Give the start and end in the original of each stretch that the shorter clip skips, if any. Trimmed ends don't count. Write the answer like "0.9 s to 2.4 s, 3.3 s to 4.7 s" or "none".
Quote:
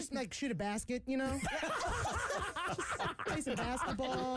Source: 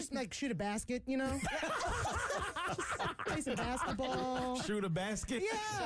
none